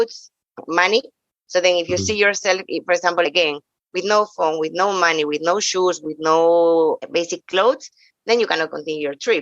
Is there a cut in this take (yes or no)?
yes